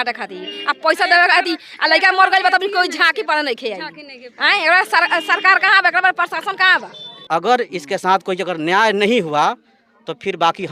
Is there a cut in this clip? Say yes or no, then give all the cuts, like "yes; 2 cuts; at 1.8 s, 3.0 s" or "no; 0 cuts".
yes; 1 cut; at 7.1 s